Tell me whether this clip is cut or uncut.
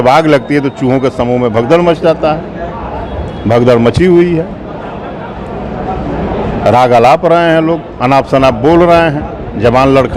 uncut